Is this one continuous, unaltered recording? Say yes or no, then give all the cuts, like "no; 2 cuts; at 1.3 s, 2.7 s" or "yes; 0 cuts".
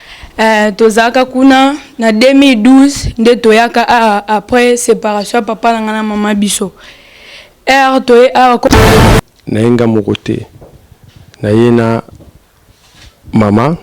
no; 1 cut; at 9.0 s